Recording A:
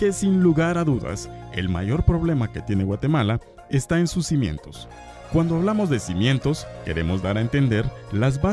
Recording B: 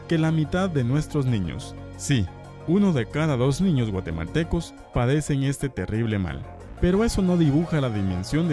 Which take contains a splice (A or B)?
B